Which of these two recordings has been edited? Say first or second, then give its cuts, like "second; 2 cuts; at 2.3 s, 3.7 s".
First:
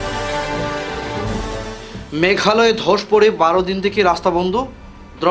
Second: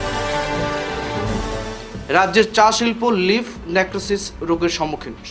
second; 1 cut; at 1.5 s